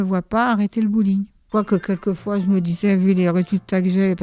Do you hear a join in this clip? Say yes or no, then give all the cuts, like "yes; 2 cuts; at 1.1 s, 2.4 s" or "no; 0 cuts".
yes; 1 cut; at 1.4 s